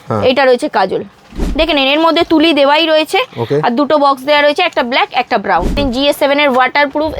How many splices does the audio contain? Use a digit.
2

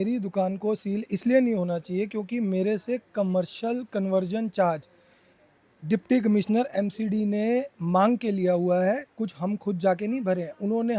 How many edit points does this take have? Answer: 0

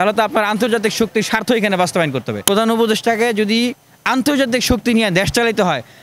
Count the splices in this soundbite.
1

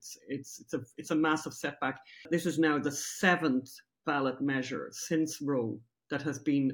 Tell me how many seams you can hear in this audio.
1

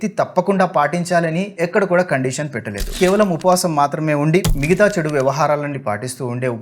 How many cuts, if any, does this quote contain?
2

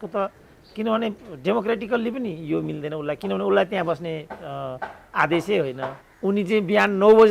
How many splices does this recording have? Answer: 1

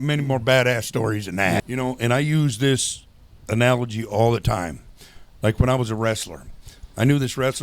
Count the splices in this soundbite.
1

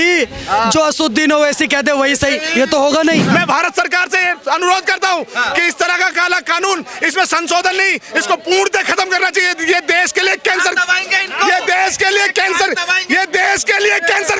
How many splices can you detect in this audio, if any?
1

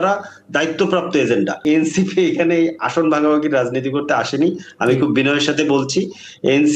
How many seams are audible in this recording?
1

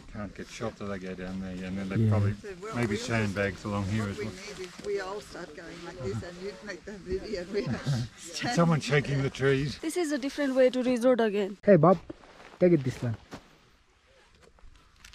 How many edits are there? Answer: 2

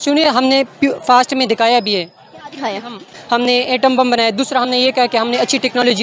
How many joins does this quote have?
1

